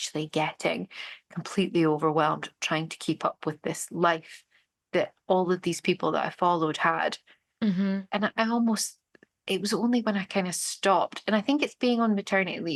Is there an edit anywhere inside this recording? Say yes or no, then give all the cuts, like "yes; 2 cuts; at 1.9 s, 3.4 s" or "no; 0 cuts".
no; 0 cuts